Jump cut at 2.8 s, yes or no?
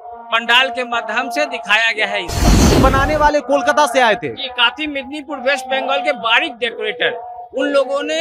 yes